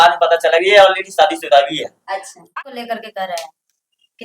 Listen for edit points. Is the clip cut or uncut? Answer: cut